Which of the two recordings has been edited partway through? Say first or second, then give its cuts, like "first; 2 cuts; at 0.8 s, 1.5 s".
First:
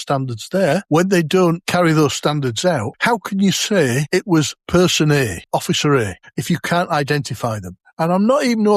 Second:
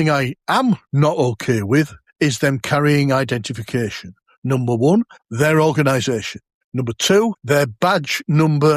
first; 6 cuts; at 0.8 s, 1.6 s, 2.9 s, 4.5 s, 5.4 s, 6.2 s